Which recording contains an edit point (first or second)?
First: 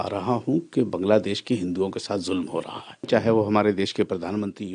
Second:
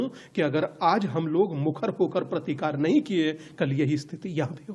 first